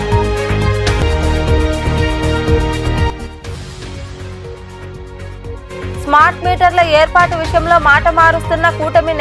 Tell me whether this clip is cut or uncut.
uncut